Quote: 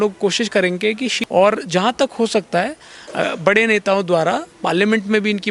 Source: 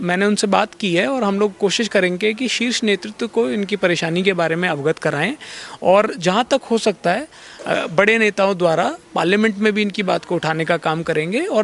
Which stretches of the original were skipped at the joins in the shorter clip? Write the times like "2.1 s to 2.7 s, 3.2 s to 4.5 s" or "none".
2.6 s to 5.7 s